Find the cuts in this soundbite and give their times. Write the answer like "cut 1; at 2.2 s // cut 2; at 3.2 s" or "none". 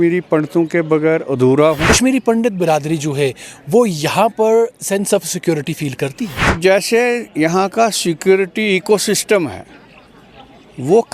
cut 1; at 1.8 s // cut 2; at 6.6 s